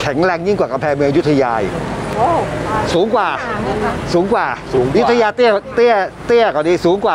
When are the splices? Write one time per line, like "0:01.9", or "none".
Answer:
none